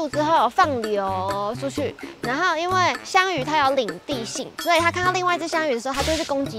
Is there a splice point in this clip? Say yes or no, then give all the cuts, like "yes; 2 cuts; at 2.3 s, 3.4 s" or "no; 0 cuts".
no; 0 cuts